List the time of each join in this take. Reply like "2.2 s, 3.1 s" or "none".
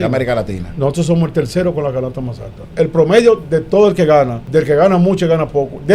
2.7 s, 4.4 s